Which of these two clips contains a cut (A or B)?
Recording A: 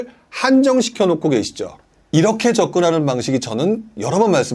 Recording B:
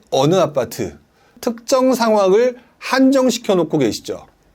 B